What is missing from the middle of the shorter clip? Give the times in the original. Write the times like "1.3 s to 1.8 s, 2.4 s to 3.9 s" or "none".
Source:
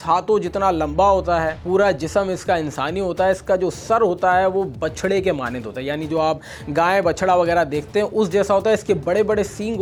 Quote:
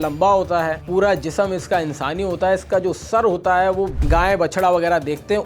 4.7 s to 6.6 s